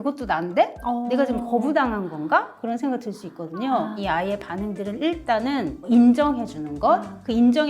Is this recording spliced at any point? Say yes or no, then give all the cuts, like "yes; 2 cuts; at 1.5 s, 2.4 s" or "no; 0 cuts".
yes; 1 cut; at 4.0 s